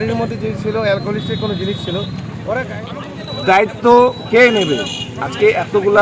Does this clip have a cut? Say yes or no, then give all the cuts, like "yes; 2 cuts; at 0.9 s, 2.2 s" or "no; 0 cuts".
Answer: yes; 1 cut; at 2.7 s